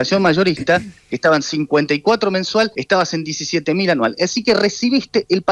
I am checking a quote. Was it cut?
yes; 1 cut; at 2.8 s

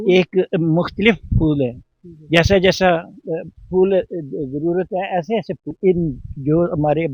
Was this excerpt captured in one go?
no; 1 cut; at 5.7 s

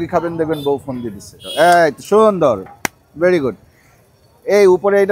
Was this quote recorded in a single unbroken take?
no; 1 cut; at 1.4 s

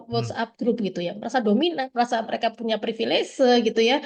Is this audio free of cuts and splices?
yes; 0 cuts

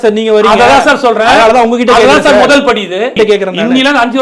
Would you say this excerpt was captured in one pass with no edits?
no; 1 cut; at 3.1 s

